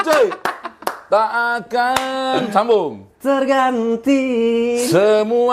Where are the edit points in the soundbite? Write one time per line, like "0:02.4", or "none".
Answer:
none